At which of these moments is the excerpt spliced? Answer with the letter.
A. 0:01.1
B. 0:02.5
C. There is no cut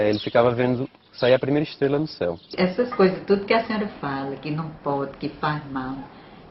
B